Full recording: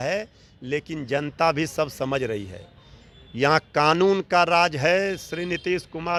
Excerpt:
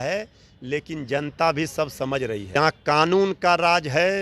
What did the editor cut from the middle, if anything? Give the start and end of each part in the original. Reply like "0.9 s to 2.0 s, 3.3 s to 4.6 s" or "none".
2.6 s to 3.4 s